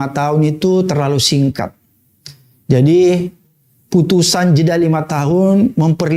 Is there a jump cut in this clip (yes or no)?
no